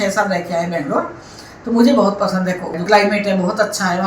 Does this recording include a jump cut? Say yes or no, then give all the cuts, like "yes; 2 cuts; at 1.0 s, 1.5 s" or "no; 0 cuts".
yes; 1 cut; at 2.8 s